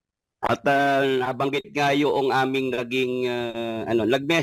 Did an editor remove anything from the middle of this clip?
no; 0 cuts

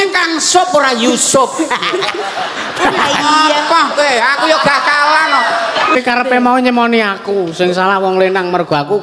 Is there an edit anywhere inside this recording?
yes; 1 cut; at 5.9 s

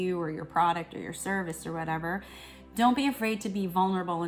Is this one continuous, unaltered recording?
yes; 0 cuts

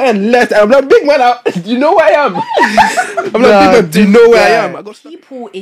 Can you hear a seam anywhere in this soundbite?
yes; 1 cut; at 4.7 s

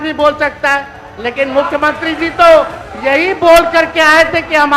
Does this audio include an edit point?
no; 0 cuts

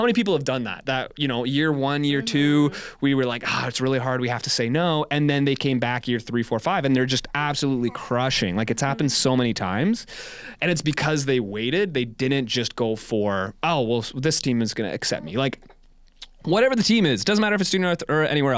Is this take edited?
no; 0 cuts

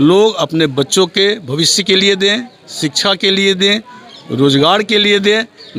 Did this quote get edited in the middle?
no; 0 cuts

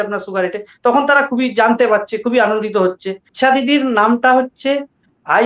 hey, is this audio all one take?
no; 1 cut; at 3.3 s

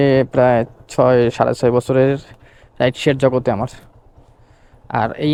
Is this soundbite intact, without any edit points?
yes; 0 cuts

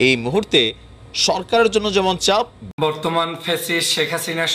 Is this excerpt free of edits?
no; 1 cut; at 2.6 s

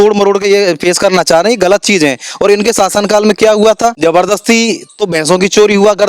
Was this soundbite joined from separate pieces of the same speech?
yes; 1 cut; at 4.0 s

